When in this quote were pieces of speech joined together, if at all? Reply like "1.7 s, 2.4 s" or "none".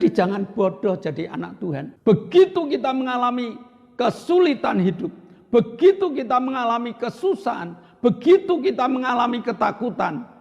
1.9 s